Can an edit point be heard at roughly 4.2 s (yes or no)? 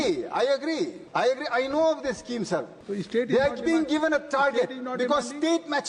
no